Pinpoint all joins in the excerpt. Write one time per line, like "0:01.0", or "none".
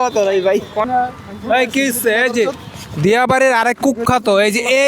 0:01.0